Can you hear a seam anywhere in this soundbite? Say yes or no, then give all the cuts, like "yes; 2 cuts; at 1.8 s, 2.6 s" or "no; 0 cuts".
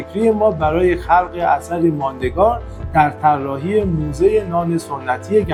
no; 0 cuts